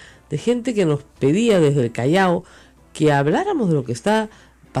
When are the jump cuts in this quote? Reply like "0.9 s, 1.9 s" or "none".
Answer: none